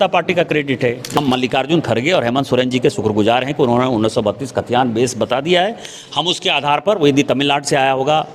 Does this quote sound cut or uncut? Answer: cut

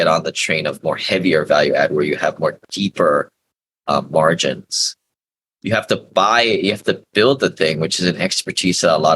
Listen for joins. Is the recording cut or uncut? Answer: uncut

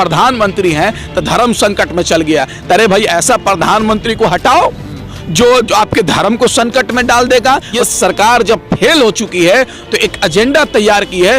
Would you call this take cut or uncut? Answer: cut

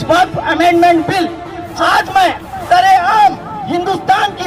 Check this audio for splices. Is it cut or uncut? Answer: cut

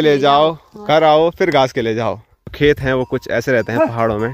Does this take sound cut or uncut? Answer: cut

